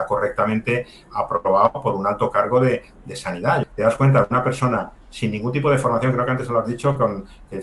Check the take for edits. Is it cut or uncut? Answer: cut